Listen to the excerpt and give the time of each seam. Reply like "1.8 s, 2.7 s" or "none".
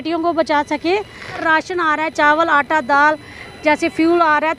1.4 s